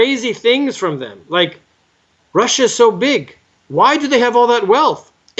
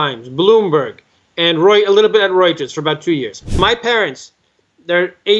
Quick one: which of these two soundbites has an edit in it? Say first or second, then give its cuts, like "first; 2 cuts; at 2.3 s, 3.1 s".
second; 1 cut; at 3.6 s